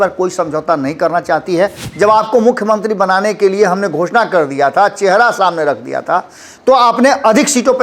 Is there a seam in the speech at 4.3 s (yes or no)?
no